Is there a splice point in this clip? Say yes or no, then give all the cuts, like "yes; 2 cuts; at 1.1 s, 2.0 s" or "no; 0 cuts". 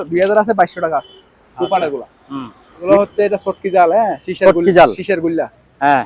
yes; 1 cut; at 2.8 s